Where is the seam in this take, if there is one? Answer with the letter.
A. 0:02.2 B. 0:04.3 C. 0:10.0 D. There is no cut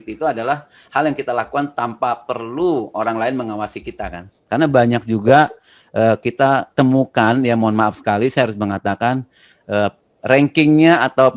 B